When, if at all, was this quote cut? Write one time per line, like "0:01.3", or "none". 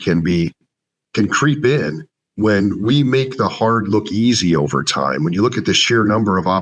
none